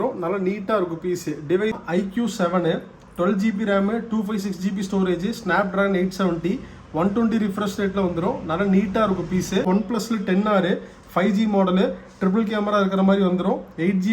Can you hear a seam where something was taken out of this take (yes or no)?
yes